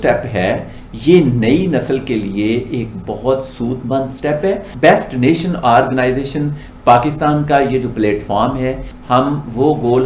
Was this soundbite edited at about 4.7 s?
yes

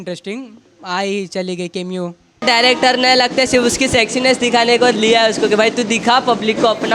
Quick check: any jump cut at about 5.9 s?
no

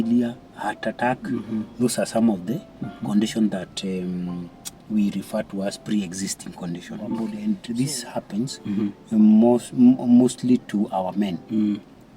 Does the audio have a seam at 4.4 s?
no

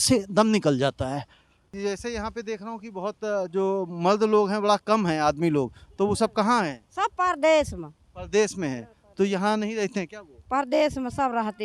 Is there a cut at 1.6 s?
yes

